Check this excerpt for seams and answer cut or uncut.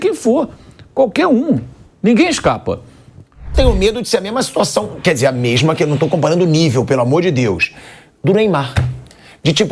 cut